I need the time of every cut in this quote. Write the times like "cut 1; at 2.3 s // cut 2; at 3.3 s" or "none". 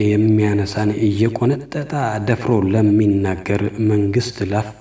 none